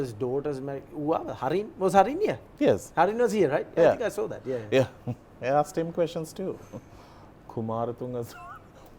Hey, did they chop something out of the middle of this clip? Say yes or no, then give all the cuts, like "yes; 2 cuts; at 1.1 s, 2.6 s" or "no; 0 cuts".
no; 0 cuts